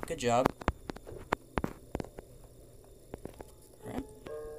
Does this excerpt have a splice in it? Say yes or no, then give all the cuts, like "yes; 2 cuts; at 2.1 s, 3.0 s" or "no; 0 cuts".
no; 0 cuts